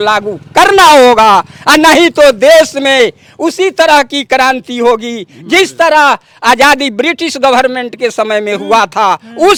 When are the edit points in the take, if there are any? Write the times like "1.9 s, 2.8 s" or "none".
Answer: none